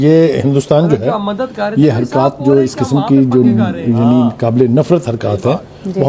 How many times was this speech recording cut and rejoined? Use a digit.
0